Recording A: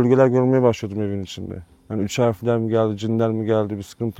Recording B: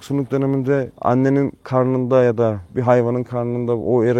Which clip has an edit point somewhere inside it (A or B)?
B